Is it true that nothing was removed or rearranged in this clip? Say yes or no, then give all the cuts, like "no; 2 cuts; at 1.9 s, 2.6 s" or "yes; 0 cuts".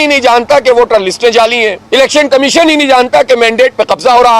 no; 1 cut; at 1.8 s